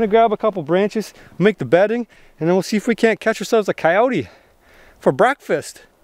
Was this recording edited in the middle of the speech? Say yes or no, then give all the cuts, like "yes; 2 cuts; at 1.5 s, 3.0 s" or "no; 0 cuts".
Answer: no; 0 cuts